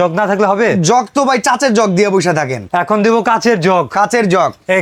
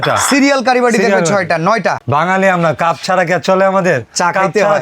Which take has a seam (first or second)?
second